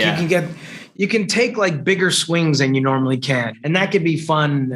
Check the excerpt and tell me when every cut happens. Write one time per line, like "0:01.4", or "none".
0:03.5